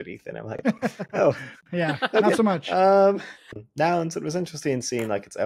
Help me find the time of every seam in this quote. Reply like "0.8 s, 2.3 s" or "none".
3.5 s